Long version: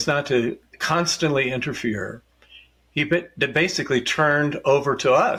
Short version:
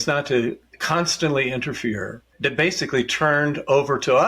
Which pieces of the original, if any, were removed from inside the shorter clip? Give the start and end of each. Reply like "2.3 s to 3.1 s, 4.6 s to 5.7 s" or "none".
2.3 s to 3.3 s